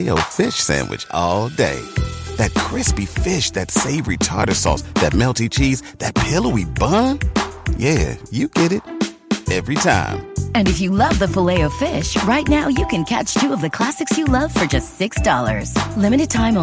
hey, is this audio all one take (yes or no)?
yes